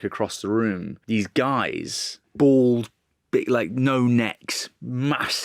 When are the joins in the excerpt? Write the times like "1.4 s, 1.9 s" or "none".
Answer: 0.9 s, 2.2 s